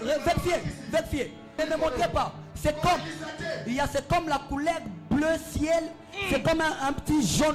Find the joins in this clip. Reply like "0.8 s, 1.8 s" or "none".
1.5 s